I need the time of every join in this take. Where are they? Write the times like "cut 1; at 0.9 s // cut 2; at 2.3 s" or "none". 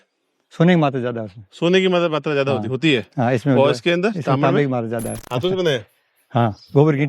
cut 1; at 5.3 s